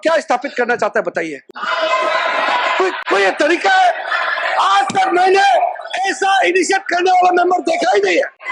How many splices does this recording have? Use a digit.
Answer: 0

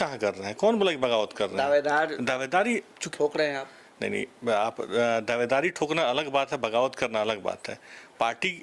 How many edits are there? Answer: 0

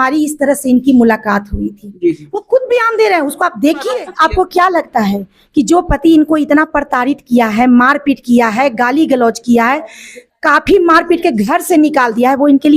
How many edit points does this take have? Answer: 1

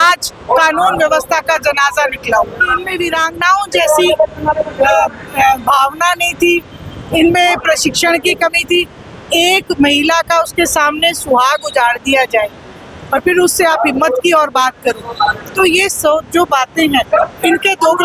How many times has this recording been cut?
1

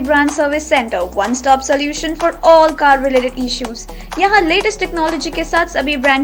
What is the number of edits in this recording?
0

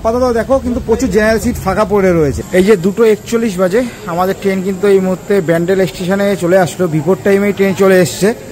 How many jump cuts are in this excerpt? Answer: 1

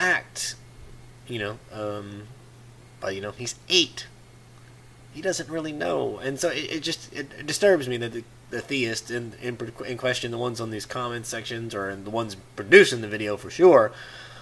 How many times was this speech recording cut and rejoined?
1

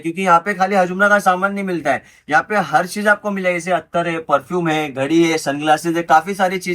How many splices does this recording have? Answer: 0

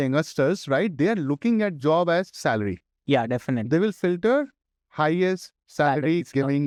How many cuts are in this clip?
0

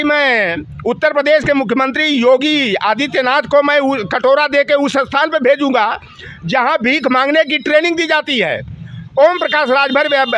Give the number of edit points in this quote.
0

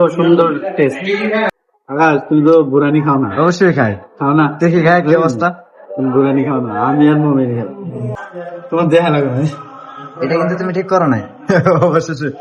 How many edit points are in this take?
2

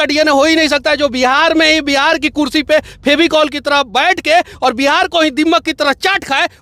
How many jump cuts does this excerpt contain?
0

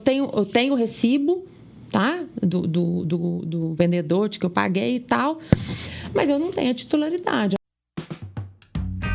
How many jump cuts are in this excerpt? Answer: 1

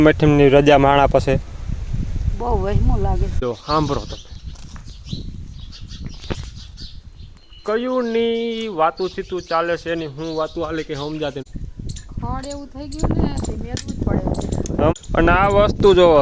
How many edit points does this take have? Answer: 3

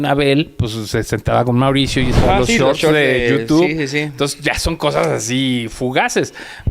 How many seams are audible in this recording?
1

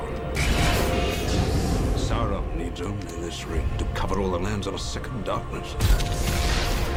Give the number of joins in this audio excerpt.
0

